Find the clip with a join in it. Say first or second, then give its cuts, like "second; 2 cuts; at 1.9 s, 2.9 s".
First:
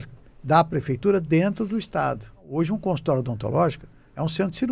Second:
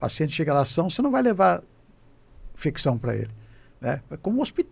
first; 1 cut; at 2.5 s